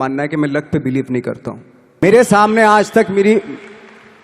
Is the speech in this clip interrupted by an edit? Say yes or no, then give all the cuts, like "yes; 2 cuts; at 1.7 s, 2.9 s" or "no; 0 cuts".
yes; 1 cut; at 2.0 s